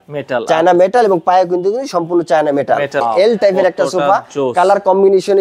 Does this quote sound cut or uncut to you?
cut